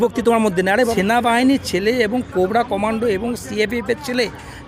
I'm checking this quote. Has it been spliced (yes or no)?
yes